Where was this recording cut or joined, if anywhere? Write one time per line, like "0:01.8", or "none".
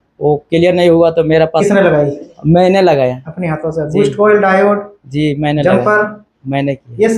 0:01.6